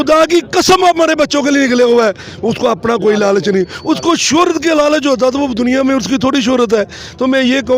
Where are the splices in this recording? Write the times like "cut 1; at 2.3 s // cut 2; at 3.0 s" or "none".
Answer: none